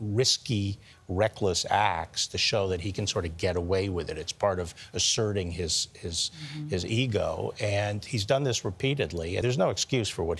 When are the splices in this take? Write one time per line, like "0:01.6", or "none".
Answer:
0:09.4